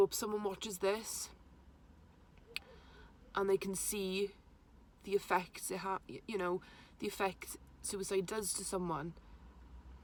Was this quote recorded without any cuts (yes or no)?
yes